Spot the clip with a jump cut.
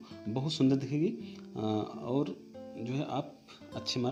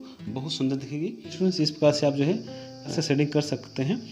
second; 2 cuts; at 1.3 s, 2.9 s

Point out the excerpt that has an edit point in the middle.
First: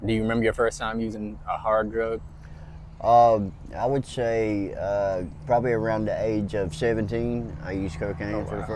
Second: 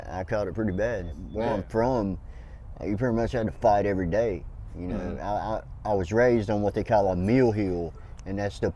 second; 1 cut; at 1.2 s

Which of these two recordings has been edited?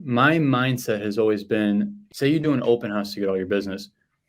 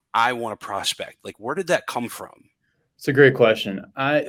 first; 1 cut; at 2.0 s

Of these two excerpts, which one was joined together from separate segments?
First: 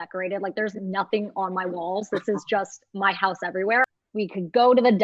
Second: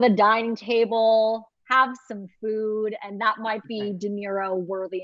first; 1 cut; at 3.8 s

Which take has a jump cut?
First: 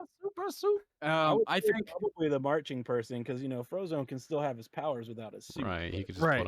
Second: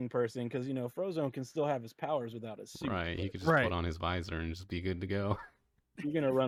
first; 1 cut; at 0.9 s

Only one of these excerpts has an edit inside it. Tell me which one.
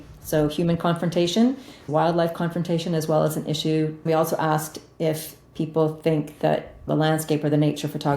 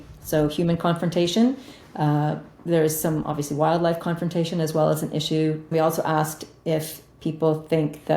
first; 2 cuts; at 1.8 s, 6.9 s

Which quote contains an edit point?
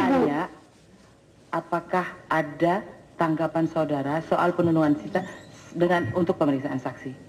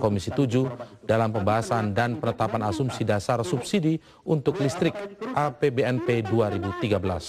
first; 1 cut; at 1.9 s

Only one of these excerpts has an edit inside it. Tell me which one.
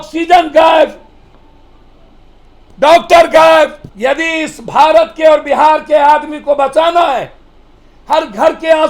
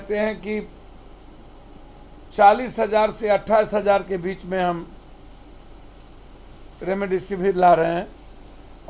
first; 1 cut; at 3.8 s

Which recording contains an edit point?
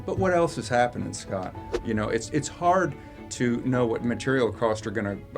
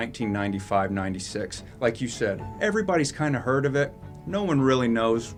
first; 1 cut; at 1.7 s

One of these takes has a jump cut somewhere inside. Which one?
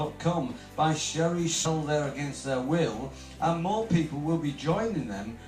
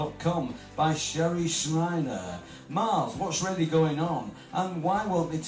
second; 1 cut; at 1.6 s

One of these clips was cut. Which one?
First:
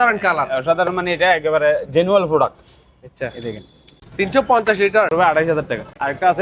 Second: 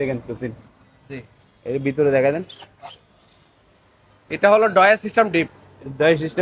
first; 2 cuts; at 4.0 s, 5.5 s

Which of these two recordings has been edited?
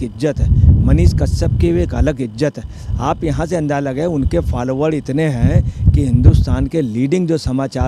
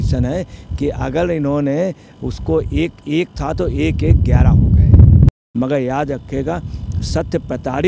second; 1 cut; at 5.4 s

